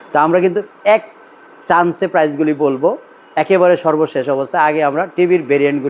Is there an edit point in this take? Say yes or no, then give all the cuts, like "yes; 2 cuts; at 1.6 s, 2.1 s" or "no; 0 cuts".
no; 0 cuts